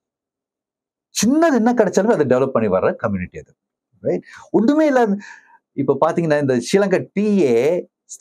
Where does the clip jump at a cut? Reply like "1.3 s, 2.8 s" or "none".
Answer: none